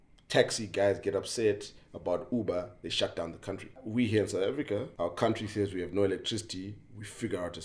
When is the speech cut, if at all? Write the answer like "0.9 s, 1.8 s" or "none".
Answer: 3.8 s, 4.9 s